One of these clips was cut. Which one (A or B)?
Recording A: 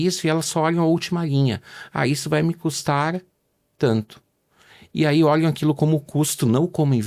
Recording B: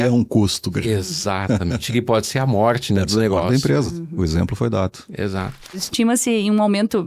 B